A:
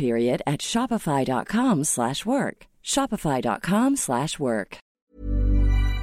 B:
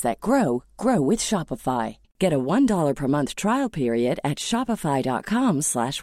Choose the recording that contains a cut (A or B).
A